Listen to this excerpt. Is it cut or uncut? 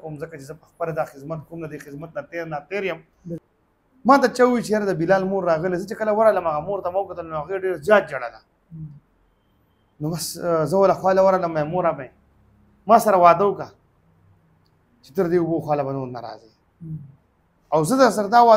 cut